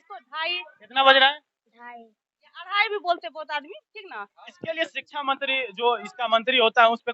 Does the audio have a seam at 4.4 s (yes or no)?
yes